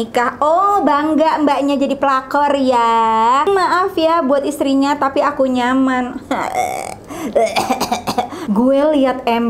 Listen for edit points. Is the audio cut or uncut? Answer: cut